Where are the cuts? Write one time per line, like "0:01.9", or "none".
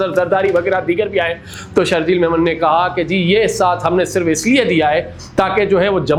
none